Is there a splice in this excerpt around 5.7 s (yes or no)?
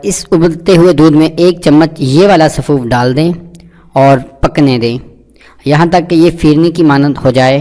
no